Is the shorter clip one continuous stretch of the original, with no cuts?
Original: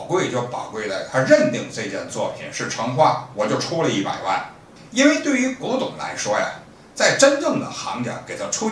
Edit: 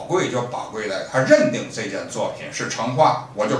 yes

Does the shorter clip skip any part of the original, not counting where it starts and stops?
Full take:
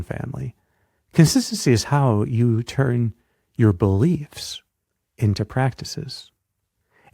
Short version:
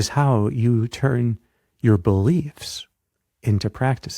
no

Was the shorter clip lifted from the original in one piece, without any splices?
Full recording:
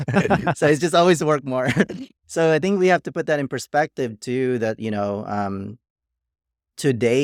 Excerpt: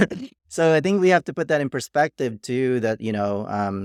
yes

